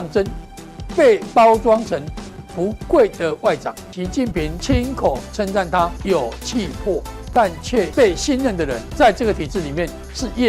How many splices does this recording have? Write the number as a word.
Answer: four